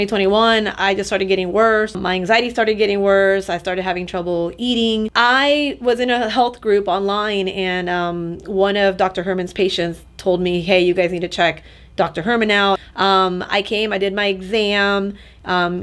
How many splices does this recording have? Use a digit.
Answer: 2